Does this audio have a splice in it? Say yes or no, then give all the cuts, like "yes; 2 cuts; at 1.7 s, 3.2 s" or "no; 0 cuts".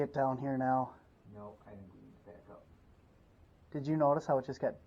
yes; 1 cut; at 3.5 s